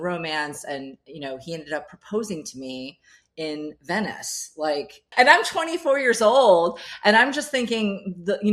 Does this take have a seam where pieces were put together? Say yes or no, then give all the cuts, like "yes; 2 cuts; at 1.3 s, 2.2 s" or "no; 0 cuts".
no; 0 cuts